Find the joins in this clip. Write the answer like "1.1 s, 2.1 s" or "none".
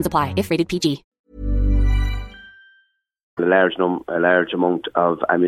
none

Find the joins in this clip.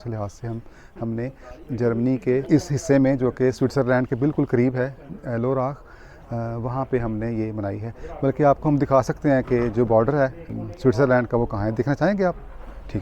2.5 s, 10.5 s

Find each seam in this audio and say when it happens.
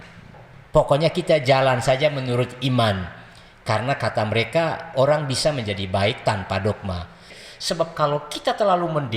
7.4 s

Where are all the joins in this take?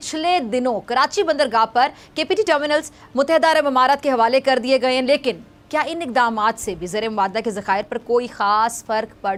none

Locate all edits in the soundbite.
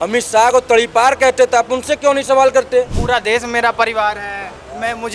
3.0 s

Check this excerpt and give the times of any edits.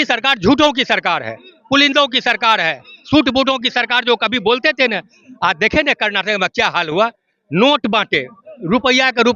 none

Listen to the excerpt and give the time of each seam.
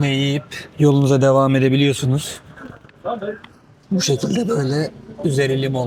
none

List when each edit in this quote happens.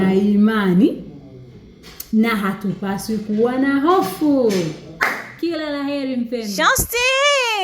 6.5 s

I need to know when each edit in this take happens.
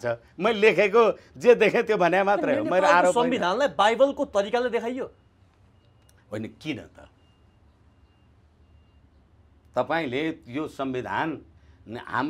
none

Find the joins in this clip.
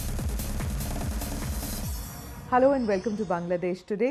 2.4 s

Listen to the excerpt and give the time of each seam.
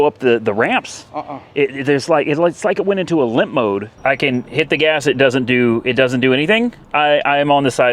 3.9 s, 6.8 s

